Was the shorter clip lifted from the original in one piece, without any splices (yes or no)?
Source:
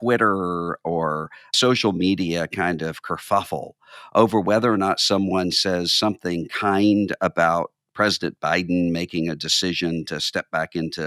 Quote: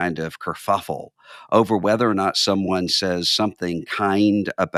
yes